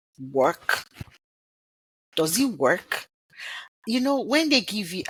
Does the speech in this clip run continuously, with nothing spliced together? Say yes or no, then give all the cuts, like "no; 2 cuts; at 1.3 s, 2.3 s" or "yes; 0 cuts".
yes; 0 cuts